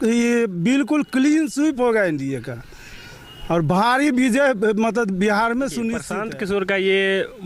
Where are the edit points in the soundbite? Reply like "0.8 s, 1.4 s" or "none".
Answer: 6.1 s